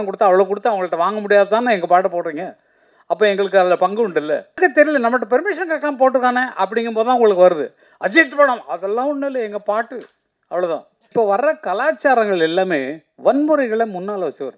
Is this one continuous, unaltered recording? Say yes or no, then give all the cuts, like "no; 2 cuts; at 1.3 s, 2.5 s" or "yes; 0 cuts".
no; 2 cuts; at 4.6 s, 11.1 s